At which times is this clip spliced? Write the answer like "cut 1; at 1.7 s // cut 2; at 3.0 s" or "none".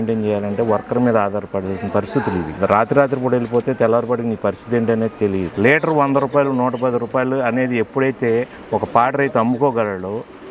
cut 1; at 2.5 s // cut 2; at 5.5 s

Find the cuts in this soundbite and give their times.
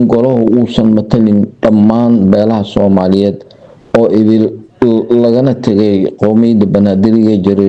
none

